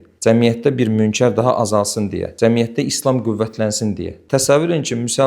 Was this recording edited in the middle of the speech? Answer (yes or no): yes